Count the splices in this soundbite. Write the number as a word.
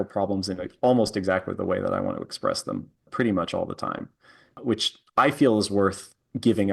two